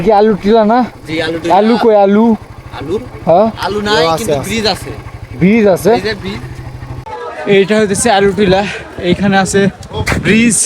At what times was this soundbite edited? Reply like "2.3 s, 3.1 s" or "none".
7.2 s